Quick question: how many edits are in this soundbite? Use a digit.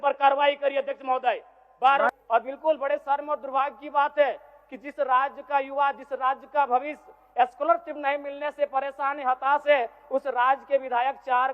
1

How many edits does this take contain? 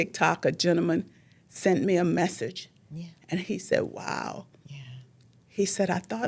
0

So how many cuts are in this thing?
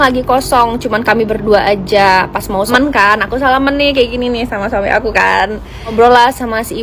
2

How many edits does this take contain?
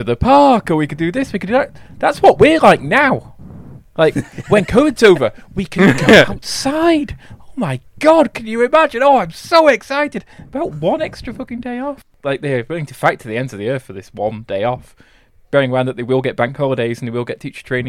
1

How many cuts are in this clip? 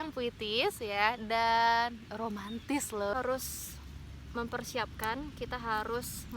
1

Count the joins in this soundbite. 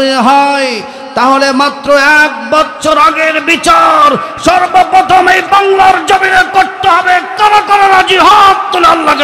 0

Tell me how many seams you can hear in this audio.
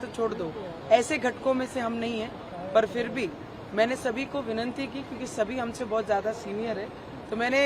0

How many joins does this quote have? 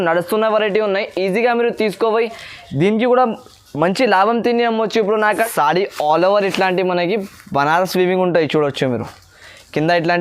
1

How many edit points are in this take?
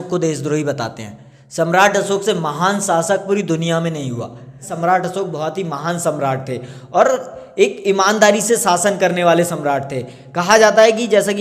1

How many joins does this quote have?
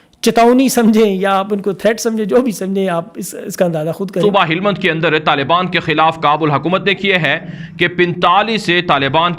1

